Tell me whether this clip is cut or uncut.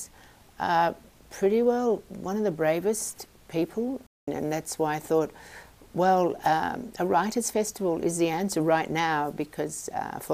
cut